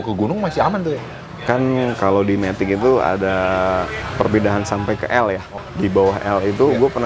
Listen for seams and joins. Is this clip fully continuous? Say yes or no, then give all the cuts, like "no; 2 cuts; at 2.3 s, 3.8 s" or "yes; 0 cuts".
no; 3 cuts; at 1.2 s, 4.0 s, 5.6 s